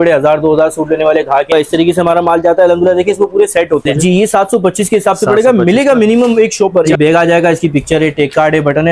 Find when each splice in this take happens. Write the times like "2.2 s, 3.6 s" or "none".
1.5 s, 3.9 s, 6.9 s